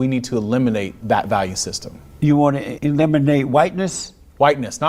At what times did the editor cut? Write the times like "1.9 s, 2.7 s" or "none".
0.9 s, 2.7 s